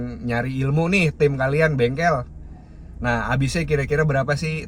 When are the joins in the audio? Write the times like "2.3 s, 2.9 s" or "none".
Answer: none